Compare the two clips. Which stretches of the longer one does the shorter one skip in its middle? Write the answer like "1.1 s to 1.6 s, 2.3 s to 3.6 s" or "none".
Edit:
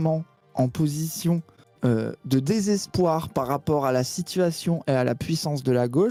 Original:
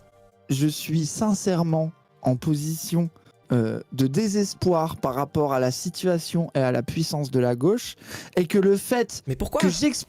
none